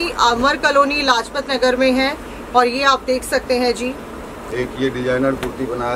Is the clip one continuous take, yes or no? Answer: yes